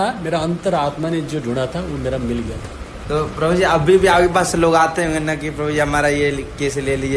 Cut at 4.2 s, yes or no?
no